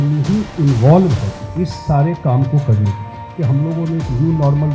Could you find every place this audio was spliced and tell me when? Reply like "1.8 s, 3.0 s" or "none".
1.4 s, 3.3 s